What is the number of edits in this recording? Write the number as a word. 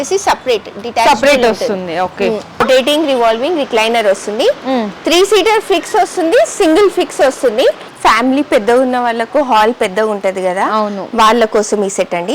two